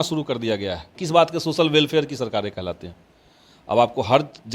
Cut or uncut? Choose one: cut